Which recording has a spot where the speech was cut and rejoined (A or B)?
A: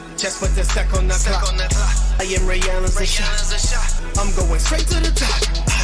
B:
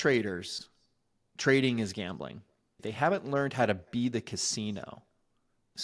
B